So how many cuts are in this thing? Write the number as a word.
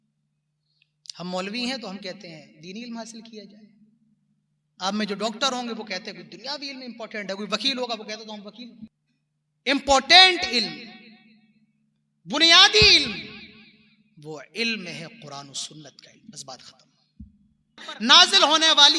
two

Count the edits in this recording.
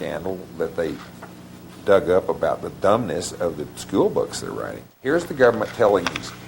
one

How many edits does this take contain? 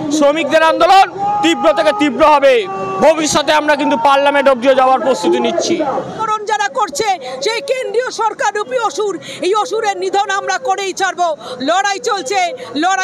one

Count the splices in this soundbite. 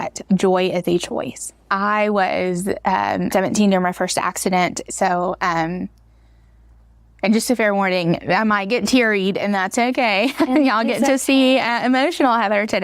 three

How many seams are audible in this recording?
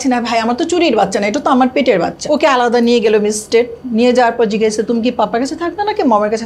one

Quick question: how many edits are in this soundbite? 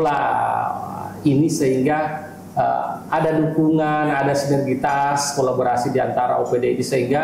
zero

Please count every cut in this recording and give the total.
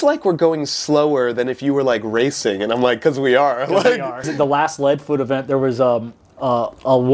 one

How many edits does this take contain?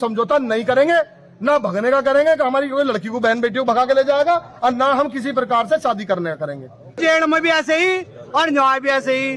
one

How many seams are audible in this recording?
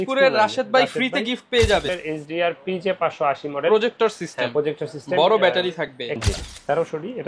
two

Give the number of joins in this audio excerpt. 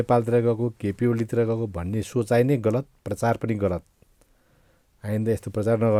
zero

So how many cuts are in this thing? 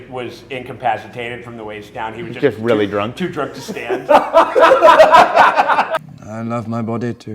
one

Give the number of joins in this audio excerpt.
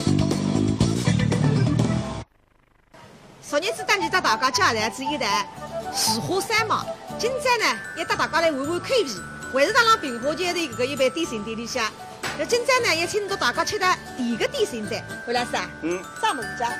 zero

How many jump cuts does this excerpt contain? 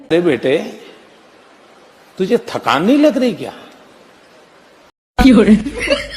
one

